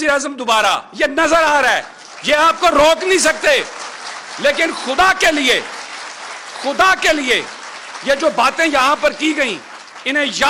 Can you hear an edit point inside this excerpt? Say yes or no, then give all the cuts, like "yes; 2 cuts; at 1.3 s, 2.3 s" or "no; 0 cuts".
no; 0 cuts